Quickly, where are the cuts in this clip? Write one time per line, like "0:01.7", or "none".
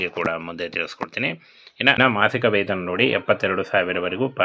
0:02.0

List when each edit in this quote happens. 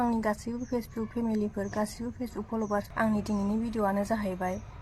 0:02.9

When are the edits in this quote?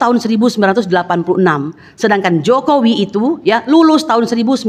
none

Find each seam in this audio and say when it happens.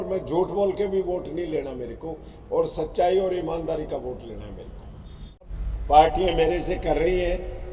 0:05.5

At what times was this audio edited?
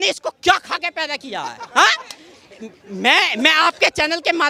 none

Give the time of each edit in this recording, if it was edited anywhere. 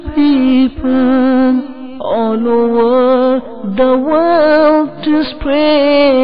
none

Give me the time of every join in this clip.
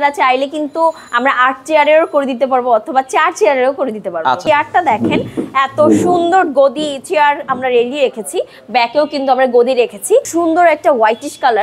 0:04.4
0:10.3

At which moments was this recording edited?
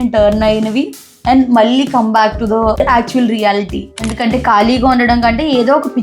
0:02.8
0:04.1

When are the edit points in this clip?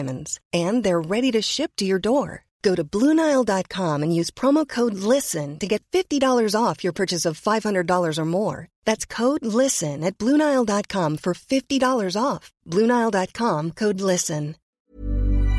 0:14.7

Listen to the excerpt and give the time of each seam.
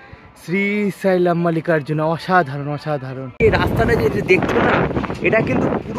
0:03.2

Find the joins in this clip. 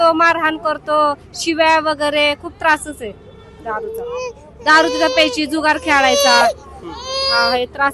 none

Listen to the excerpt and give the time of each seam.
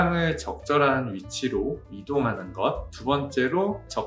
none

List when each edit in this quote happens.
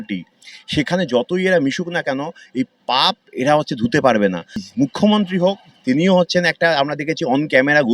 0:04.6

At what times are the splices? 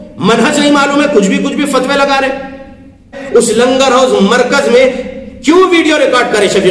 0:03.2

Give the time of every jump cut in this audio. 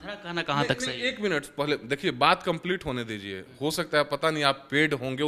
none

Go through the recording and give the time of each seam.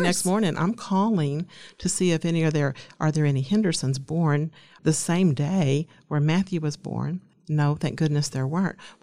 0:04.7
0:07.3

